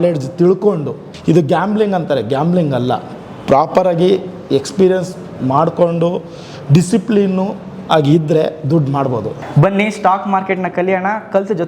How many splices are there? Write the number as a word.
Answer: two